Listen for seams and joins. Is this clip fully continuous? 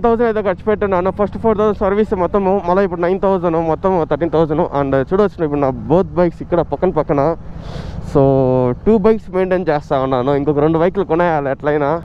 yes; 0 cuts

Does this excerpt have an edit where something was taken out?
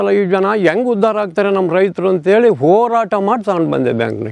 no; 0 cuts

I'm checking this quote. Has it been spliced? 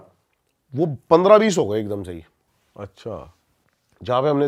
no; 0 cuts

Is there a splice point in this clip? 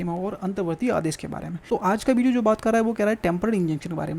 yes; 1 cut; at 1.5 s

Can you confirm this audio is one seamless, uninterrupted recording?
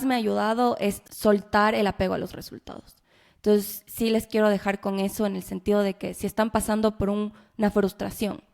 no; 1 cut; at 1.0 s

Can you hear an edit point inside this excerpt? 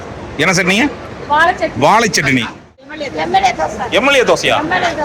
yes; 1 cut; at 3.0 s

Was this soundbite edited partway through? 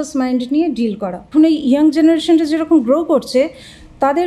yes; 1 cut; at 1.2 s

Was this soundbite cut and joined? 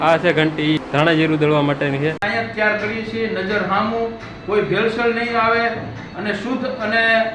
yes; 2 cuts; at 0.8 s, 2.2 s

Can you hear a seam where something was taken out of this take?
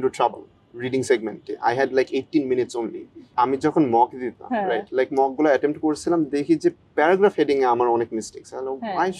yes; 1 cut; at 3.3 s

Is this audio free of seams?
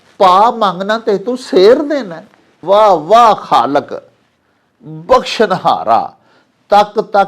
no; 1 cut; at 2.5 s

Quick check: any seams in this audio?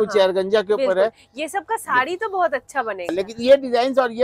yes; 1 cut; at 3.1 s

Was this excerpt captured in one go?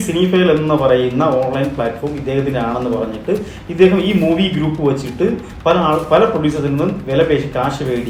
yes; 0 cuts

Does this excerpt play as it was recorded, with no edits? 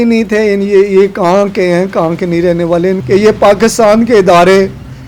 no; 1 cut; at 3.0 s

